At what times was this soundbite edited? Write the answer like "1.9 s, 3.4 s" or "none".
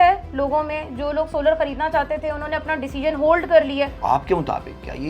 4.0 s